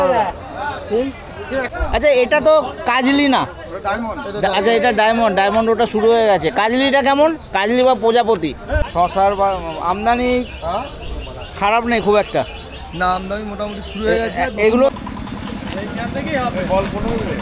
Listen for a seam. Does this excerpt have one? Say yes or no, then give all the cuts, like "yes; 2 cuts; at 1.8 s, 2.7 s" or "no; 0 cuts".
yes; 3 cuts; at 1.7 s, 8.8 s, 14.9 s